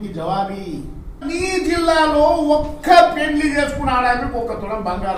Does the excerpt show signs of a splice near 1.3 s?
yes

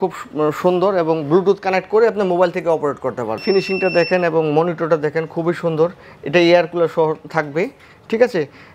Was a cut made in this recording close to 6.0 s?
no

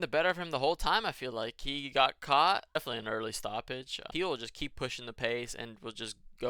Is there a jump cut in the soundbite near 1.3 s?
no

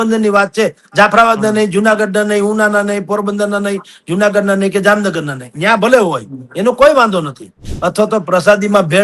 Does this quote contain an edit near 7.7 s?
yes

